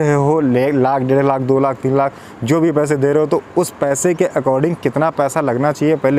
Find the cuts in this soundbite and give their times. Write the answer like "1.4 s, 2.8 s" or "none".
none

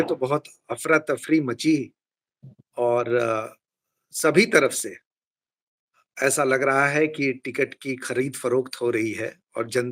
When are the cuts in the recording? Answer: none

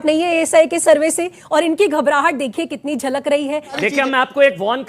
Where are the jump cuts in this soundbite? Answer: 3.7 s

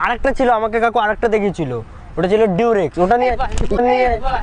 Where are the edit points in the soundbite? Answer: none

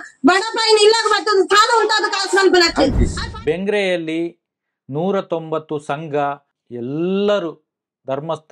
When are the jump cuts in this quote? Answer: 3.2 s, 6.5 s

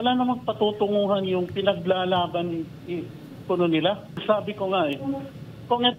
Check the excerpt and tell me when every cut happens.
4.2 s

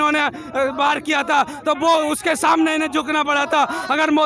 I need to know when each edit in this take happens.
none

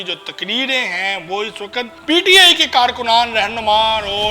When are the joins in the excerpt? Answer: 1.9 s

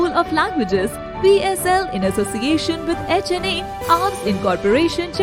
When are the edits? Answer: none

